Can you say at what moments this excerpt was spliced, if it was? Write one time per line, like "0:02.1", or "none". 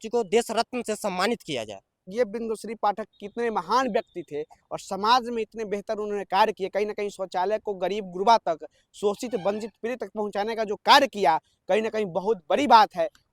0:02.1